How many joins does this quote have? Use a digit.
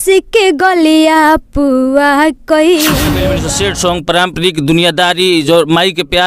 1